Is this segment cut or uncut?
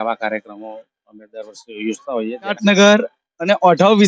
cut